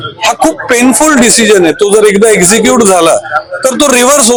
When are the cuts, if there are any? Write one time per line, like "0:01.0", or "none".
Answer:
none